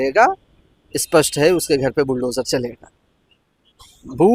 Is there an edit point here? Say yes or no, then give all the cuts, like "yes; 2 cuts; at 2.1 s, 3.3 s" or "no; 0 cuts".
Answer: no; 0 cuts